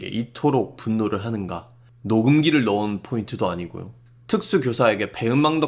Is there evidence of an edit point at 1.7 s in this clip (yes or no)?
no